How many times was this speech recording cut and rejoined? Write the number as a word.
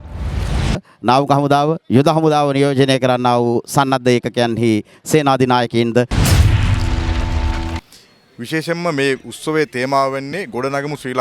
three